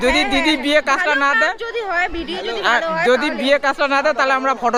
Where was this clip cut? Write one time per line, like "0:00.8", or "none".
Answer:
none